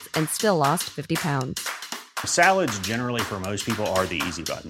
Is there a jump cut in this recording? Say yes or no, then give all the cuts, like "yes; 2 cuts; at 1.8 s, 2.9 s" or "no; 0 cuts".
no; 0 cuts